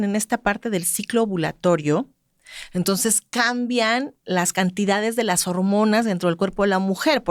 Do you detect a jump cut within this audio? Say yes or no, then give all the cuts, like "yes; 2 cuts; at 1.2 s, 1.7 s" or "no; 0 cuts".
no; 0 cuts